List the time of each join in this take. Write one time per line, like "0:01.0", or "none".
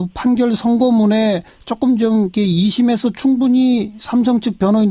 0:01.7